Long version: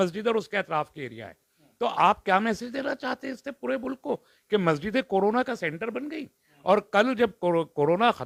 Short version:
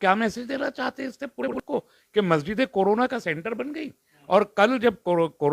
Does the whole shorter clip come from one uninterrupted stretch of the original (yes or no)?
no